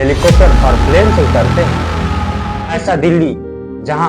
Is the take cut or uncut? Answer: cut